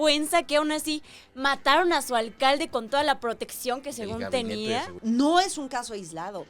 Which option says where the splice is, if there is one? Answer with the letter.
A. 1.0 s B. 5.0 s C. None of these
B